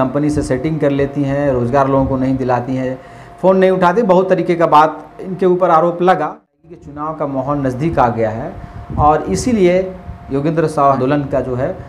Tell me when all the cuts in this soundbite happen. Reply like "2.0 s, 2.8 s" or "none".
6.6 s, 11.0 s